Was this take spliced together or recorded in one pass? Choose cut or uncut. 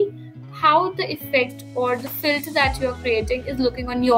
uncut